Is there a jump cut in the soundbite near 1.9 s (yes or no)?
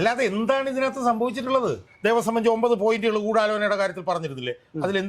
yes